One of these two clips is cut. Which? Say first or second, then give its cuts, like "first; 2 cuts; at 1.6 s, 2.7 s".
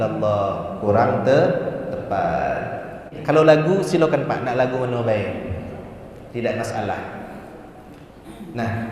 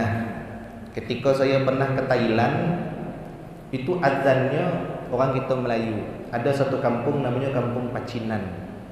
first; 1 cut; at 3.1 s